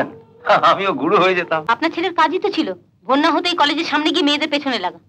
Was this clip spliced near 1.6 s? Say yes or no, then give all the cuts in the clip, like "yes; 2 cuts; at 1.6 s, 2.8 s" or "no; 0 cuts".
yes; 1 cut; at 1.6 s